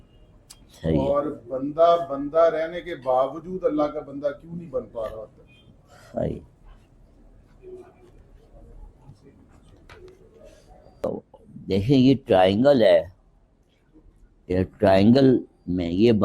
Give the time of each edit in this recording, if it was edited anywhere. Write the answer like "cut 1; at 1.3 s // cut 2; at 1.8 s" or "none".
cut 1; at 11.0 s